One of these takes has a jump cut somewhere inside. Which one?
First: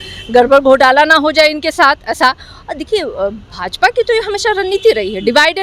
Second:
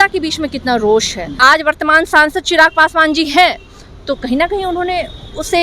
second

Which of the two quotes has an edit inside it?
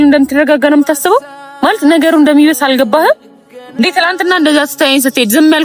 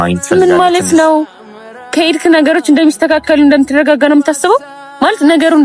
first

